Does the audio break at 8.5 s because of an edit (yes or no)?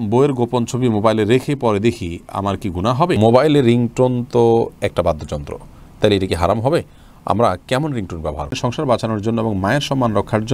yes